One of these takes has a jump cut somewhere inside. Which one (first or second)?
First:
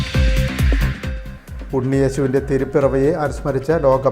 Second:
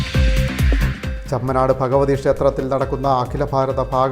second